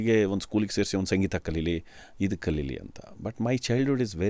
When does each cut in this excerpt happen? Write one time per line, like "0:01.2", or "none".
none